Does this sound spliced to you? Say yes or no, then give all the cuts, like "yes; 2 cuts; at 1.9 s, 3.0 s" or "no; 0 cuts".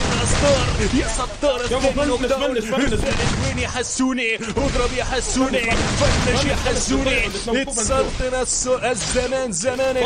no; 0 cuts